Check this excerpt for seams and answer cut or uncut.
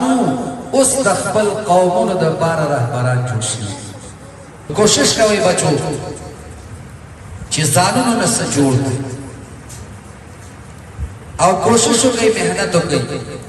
cut